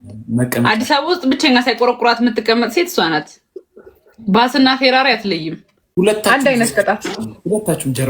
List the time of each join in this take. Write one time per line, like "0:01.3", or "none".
0:05.7